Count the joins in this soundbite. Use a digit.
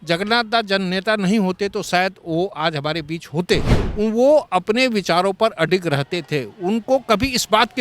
1